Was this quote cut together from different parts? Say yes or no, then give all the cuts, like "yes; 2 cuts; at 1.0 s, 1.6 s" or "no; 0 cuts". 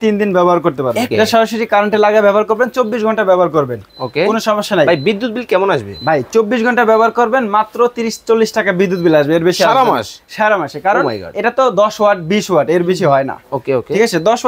yes; 1 cut; at 1.1 s